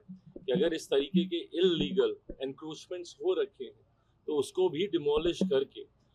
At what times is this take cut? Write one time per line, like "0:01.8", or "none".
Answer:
none